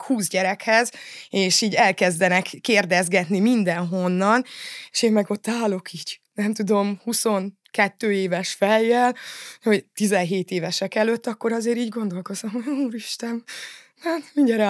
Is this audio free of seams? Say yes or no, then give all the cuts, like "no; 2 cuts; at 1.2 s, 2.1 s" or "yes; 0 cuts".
yes; 0 cuts